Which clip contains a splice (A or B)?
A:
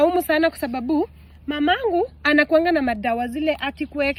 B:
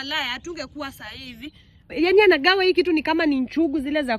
B